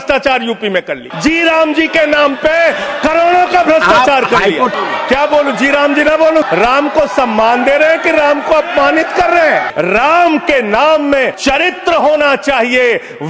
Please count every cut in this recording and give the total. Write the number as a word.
five